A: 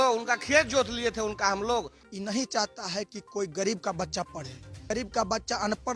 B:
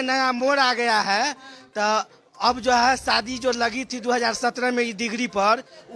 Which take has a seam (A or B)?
A